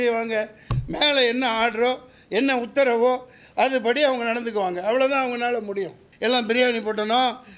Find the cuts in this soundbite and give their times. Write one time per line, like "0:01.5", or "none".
0:06.0